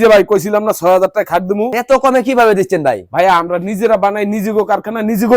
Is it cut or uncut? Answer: cut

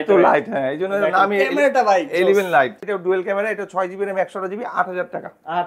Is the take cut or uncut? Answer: cut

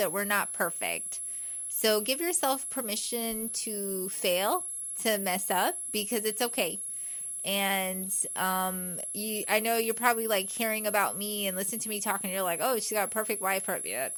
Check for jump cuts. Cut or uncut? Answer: uncut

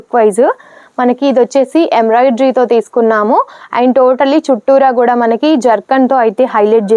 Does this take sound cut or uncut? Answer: uncut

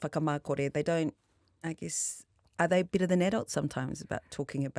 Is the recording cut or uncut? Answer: uncut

